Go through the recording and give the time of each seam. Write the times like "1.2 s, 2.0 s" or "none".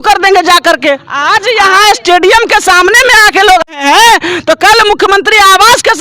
1.1 s, 3.7 s